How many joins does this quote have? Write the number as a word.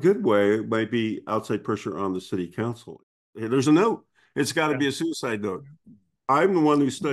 one